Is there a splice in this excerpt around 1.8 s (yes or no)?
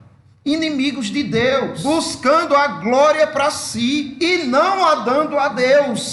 yes